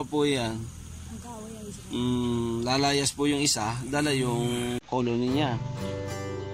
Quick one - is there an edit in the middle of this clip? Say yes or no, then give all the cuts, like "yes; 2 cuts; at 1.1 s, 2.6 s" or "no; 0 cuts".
yes; 1 cut; at 5.6 s